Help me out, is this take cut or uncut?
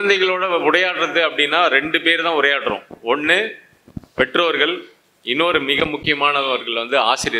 uncut